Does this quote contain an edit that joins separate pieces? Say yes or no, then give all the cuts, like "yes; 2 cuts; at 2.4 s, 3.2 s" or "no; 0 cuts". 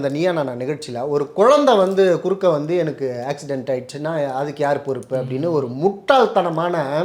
no; 0 cuts